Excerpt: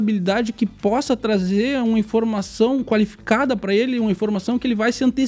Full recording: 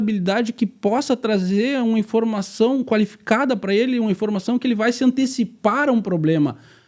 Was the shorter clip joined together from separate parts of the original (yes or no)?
no